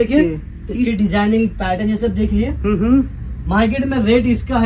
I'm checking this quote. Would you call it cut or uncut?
uncut